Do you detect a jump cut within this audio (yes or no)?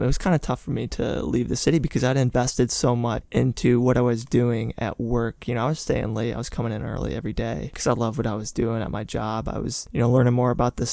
no